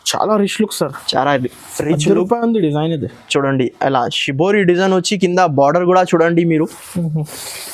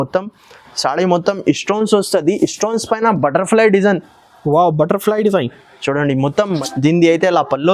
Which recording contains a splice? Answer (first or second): second